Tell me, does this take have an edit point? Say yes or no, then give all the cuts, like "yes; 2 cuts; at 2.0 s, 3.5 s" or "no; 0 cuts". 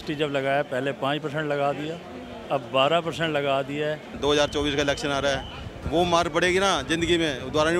yes; 1 cut; at 4.1 s